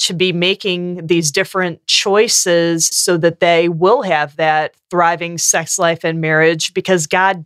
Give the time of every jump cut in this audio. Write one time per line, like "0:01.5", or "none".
0:03.0